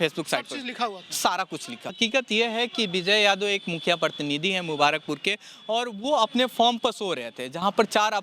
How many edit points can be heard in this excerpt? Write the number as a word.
one